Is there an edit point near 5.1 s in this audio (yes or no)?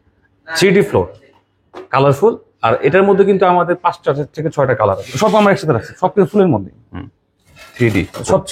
yes